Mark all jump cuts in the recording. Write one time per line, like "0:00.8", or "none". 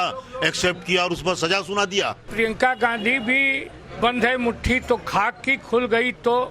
0:02.2